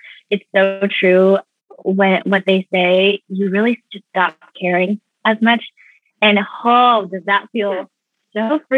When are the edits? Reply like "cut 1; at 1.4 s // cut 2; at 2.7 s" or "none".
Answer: none